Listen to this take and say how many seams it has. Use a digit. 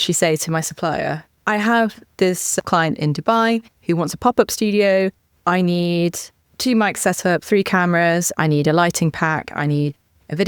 0